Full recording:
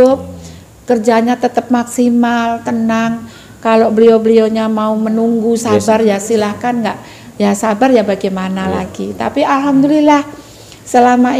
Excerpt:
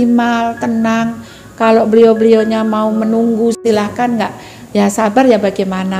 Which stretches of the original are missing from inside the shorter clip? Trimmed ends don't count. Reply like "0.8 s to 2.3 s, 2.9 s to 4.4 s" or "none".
5.6 s to 6.2 s